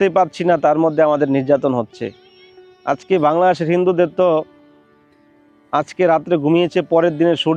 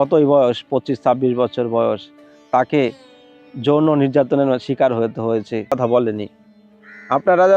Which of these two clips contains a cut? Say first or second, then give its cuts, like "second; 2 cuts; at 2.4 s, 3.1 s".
second; 1 cut; at 5.8 s